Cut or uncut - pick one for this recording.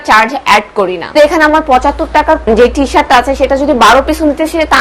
cut